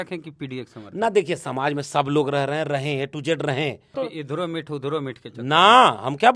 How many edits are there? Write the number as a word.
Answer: one